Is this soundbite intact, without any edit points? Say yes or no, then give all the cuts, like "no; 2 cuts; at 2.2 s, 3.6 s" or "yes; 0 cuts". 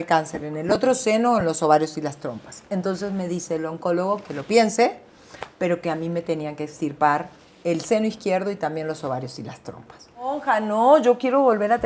no; 1 cut; at 10.4 s